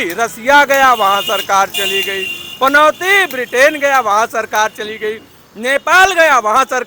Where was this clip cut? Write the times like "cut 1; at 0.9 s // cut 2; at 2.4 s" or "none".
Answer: none